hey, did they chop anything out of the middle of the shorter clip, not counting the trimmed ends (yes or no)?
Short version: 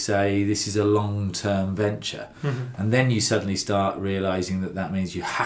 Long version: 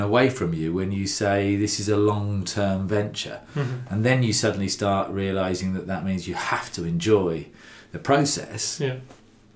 no